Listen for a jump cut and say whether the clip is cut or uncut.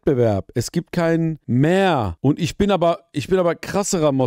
cut